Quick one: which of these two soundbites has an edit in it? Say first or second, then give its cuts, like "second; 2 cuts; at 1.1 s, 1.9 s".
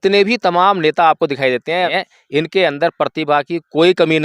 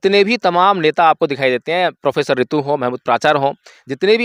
first; 1 cut; at 1.9 s